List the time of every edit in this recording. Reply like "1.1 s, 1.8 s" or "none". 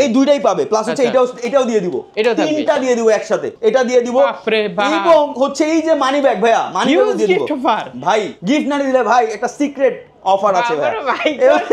3.5 s, 8.3 s